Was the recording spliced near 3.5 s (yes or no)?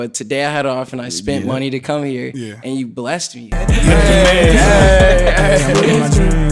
yes